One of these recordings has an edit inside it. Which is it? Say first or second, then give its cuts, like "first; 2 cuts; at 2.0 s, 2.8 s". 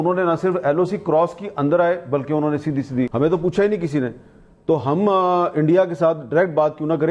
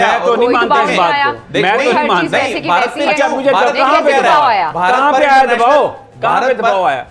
first; 1 cut; at 3.1 s